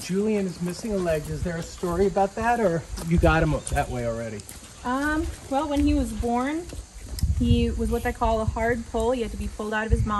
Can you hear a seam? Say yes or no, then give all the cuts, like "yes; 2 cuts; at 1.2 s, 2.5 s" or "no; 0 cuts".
no; 0 cuts